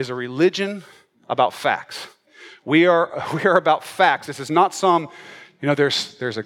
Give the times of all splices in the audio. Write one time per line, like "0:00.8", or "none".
0:02.2